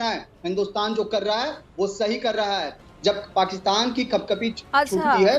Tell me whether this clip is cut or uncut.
cut